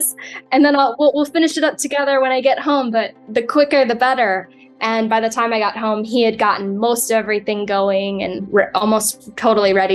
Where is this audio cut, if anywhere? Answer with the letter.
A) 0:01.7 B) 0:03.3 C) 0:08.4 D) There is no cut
C